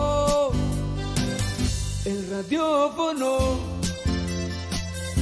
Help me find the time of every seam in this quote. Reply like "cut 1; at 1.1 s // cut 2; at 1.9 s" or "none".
none